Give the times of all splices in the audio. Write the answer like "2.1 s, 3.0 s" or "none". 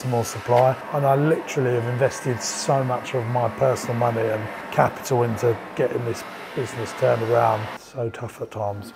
0.9 s, 7.8 s

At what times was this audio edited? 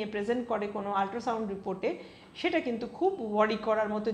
none

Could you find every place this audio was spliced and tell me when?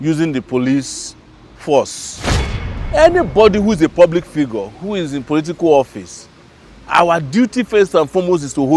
2.6 s

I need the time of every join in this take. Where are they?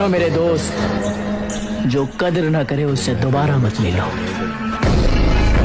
none

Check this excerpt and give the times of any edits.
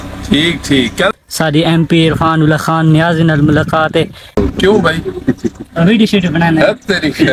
none

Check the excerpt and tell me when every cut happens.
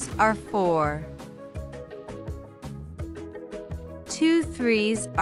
none

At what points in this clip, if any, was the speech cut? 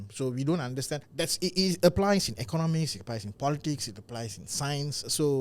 1.1 s

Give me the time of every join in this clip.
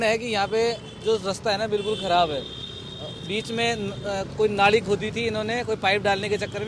none

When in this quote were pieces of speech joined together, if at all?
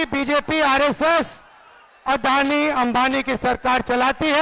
none

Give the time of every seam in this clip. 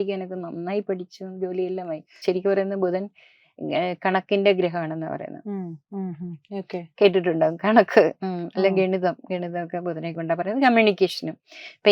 2.1 s

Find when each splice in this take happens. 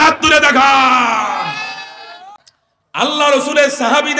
2.3 s

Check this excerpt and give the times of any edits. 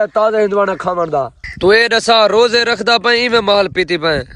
1.4 s

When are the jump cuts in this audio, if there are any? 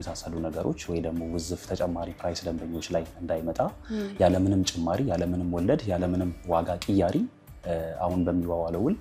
none

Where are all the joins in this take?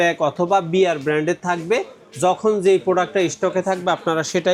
none

